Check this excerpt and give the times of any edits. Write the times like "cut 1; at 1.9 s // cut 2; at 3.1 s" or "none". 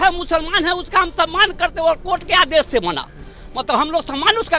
none